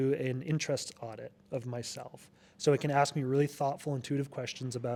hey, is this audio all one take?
yes; 0 cuts

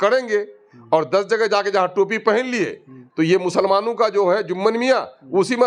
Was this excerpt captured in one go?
yes; 0 cuts

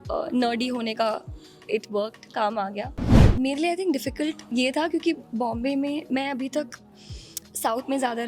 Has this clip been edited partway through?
yes; 1 cut; at 3.3 s

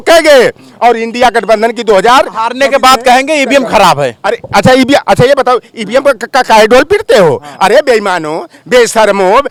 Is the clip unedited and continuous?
yes; 0 cuts

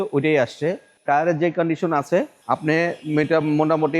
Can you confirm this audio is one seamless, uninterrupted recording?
no; 2 cuts; at 0.9 s, 2.4 s

